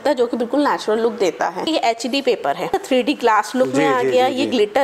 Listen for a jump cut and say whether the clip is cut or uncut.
cut